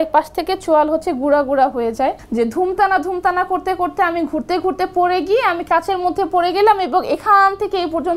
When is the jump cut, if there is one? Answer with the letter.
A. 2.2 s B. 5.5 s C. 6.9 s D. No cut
A